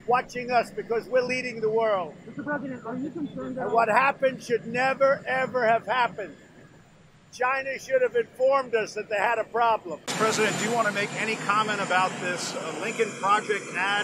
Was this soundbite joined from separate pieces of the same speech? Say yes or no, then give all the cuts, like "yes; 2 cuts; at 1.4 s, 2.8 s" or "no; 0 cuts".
yes; 1 cut; at 10.0 s